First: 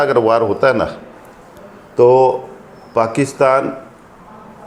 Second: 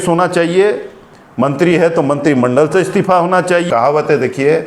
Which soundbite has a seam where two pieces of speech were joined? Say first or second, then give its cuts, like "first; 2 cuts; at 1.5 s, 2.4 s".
second; 1 cut; at 3.7 s